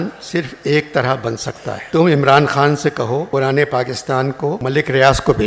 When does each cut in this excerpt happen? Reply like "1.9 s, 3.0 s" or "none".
1.8 s, 3.3 s, 4.6 s